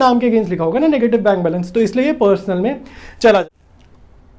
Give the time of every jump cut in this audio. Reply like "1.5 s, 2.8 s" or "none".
none